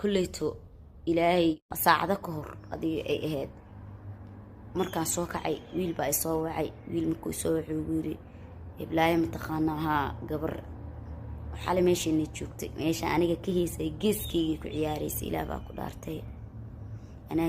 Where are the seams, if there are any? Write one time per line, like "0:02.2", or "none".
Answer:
0:01.6